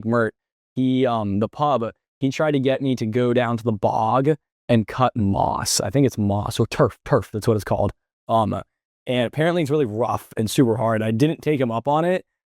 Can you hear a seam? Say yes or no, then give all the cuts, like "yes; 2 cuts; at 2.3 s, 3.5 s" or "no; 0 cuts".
no; 0 cuts